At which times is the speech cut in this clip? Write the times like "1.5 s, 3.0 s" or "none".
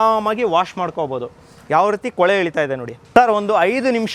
2.9 s